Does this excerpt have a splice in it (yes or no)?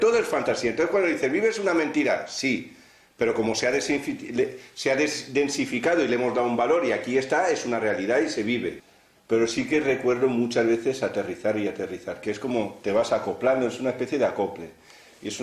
yes